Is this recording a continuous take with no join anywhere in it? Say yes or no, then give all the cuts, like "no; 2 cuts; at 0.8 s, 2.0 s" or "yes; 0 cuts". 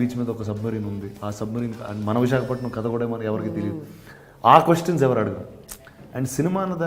yes; 0 cuts